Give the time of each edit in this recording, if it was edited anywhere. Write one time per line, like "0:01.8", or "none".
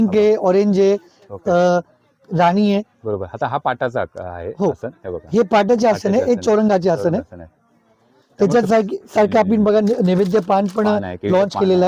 none